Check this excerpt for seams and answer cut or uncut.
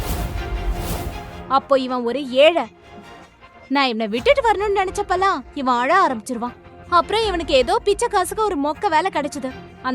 cut